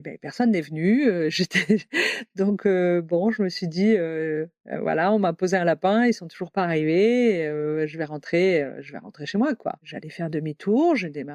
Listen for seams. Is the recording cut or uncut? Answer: cut